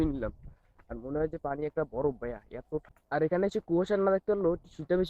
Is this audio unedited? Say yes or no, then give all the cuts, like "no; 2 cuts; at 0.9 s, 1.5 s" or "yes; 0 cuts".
no; 1 cut; at 2.9 s